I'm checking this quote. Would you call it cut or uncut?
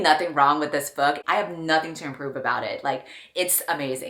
cut